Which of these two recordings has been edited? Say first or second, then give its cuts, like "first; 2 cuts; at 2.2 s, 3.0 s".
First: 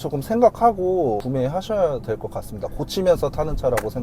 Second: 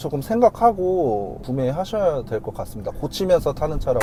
first; 1 cut; at 1.2 s